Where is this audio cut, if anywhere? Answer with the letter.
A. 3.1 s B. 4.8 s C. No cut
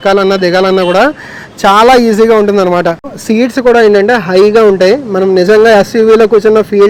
C